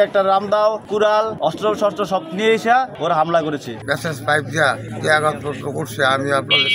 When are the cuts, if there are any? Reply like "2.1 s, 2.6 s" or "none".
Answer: 1.0 s, 2.9 s, 3.8 s, 4.9 s